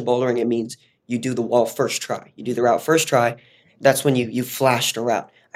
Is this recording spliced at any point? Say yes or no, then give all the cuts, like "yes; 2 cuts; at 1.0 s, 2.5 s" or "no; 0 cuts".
no; 0 cuts